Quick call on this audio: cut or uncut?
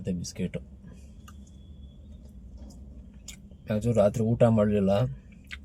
uncut